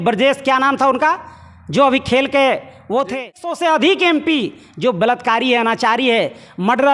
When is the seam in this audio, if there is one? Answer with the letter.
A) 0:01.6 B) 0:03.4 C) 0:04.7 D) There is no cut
B